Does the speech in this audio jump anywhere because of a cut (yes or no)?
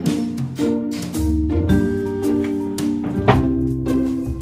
no